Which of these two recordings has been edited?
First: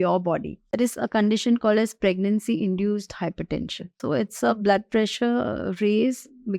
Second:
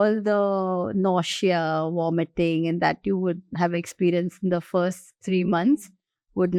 first; 2 cuts; at 0.8 s, 4.0 s

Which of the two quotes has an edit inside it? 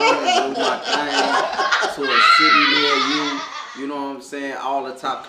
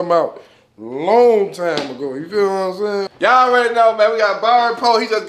second; 1 cut; at 3.1 s

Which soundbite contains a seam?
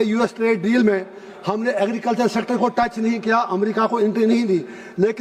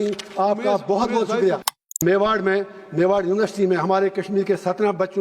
second; 1 cut; at 2.0 s

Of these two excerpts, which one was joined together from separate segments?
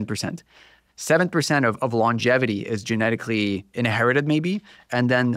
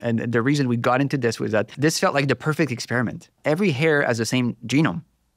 second; 2 cuts; at 1.7 s, 3.4 s

